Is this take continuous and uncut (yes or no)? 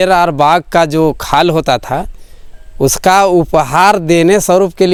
yes